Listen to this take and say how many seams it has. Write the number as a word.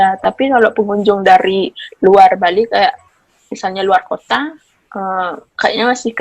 zero